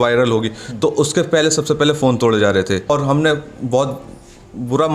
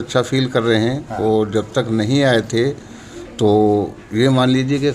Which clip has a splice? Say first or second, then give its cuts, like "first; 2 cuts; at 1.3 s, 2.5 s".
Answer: first; 1 cut; at 2.9 s